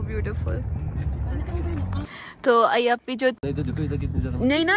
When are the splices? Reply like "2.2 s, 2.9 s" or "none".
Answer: 3.4 s